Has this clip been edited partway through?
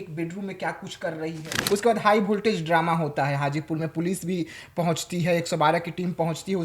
yes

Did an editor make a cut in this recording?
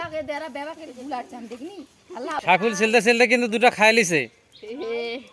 yes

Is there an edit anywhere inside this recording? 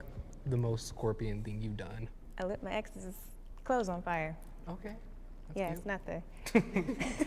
no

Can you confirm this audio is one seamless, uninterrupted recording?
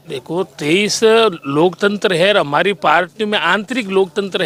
yes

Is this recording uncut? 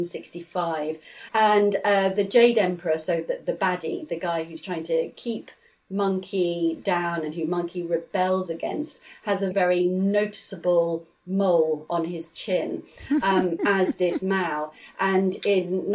no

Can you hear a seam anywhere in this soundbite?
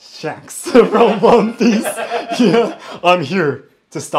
no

